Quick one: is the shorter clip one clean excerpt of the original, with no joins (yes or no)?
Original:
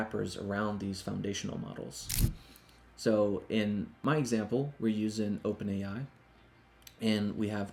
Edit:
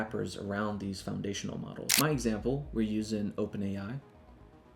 no